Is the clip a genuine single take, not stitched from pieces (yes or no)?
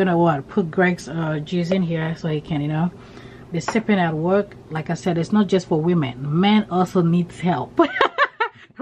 yes